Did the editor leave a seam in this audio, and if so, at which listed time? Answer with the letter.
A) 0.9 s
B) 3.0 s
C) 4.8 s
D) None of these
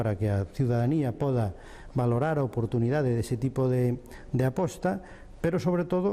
C